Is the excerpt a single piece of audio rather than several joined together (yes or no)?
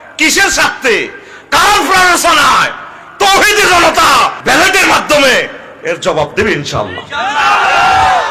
no